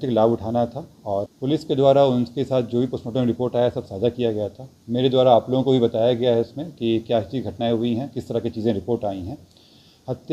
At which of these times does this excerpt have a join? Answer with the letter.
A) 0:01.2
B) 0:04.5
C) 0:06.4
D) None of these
A